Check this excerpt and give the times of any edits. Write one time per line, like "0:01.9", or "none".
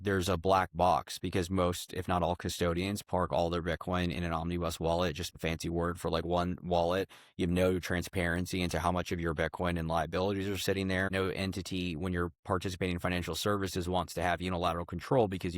0:05.3
0:11.1